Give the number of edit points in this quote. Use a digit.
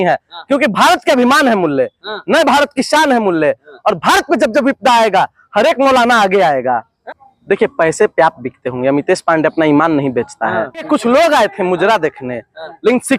2